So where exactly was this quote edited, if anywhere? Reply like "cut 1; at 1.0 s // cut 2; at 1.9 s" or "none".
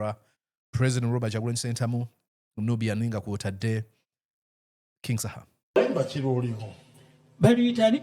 cut 1; at 5.8 s